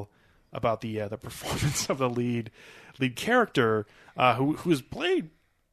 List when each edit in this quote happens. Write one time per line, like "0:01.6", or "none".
none